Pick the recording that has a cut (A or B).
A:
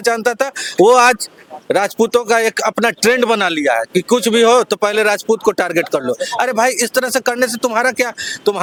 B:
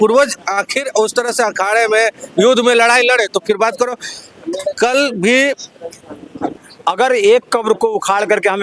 B